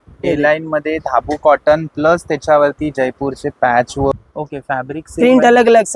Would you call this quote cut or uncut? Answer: cut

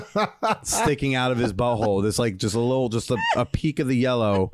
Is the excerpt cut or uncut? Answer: uncut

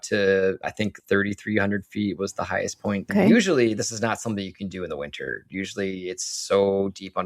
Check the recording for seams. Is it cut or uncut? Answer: cut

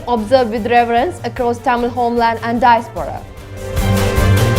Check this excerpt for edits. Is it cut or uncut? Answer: cut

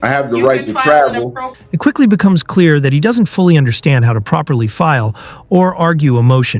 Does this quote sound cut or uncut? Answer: uncut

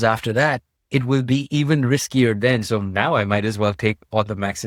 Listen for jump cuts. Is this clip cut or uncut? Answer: uncut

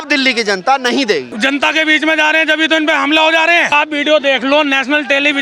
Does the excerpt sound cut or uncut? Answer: cut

